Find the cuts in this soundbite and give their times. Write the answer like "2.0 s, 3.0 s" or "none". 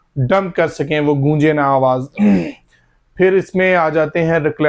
none

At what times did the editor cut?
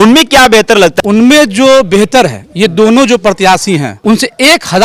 0.9 s, 3.9 s

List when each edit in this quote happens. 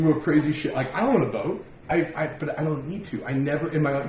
1.7 s

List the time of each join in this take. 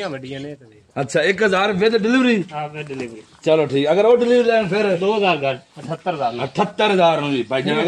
none

